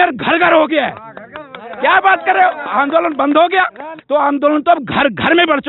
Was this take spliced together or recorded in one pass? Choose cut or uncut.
cut